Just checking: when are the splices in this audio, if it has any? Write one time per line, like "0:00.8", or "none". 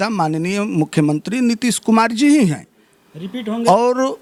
none